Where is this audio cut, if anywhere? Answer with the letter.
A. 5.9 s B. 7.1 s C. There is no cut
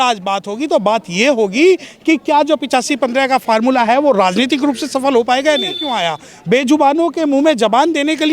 A